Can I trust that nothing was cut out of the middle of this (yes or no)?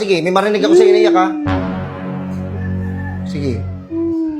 yes